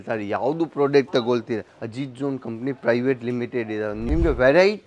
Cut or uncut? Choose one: cut